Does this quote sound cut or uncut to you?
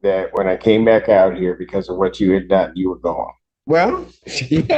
cut